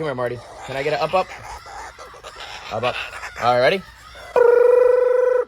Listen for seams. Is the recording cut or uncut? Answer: uncut